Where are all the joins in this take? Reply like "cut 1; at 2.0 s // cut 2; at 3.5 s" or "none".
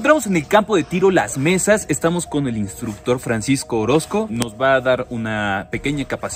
none